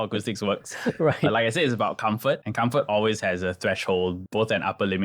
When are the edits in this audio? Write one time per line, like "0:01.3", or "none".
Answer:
0:02.5
0:04.2